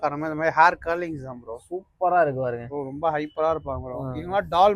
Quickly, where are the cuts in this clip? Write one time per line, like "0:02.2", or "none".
0:02.7